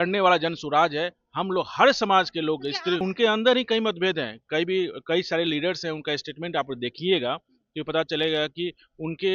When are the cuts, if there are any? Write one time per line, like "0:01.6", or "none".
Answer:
0:03.0